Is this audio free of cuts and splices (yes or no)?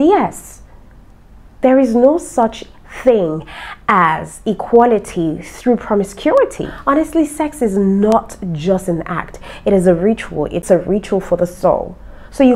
no